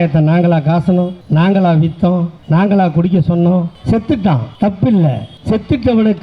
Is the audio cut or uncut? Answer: cut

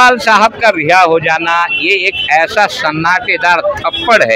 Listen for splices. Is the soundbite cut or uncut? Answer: uncut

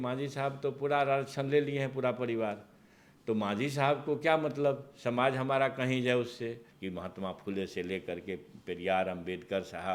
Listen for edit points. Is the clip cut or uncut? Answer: uncut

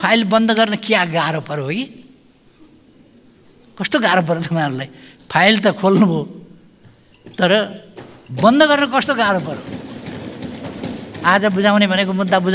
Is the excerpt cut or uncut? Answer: uncut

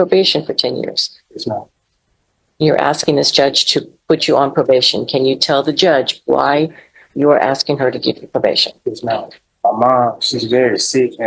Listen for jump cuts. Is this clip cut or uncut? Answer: cut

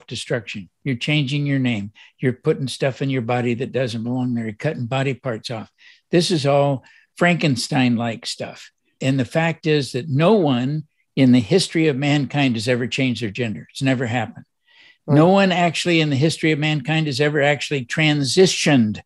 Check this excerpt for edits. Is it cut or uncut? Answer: cut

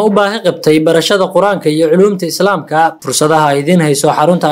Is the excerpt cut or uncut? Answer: cut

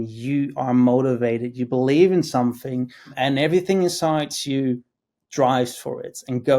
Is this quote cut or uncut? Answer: cut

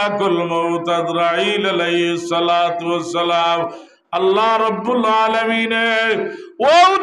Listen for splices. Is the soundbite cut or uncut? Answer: cut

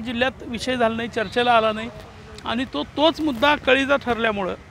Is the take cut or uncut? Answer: uncut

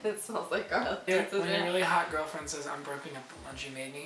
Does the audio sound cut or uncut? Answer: cut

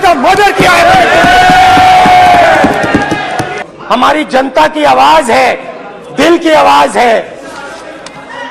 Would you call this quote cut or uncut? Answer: cut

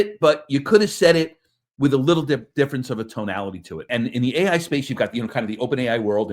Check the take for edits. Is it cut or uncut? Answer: cut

